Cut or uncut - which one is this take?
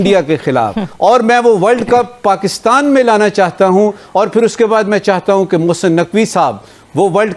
uncut